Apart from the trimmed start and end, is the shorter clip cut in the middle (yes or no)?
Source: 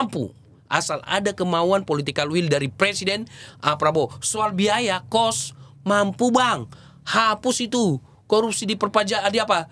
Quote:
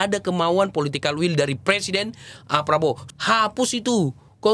yes